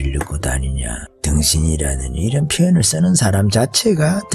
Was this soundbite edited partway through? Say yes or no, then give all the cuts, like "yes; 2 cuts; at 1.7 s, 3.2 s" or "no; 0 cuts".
yes; 1 cut; at 1.1 s